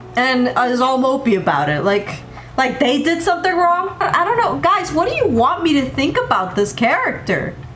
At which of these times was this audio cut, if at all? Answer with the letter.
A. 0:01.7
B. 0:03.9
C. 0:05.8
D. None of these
B